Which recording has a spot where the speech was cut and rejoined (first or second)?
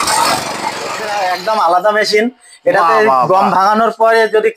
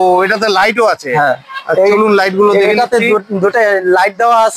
first